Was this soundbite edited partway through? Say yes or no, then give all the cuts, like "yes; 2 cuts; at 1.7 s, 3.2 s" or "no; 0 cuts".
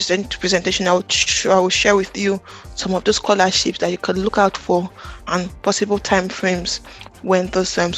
no; 0 cuts